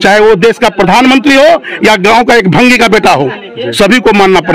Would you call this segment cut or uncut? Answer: uncut